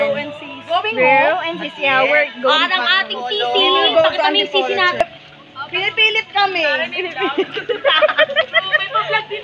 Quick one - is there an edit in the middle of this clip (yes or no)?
yes